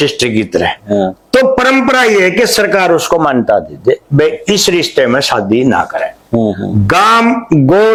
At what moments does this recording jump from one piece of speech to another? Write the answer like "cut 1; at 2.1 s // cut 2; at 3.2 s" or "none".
none